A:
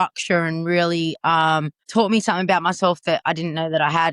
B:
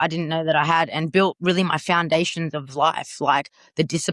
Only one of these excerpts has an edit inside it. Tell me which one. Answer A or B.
A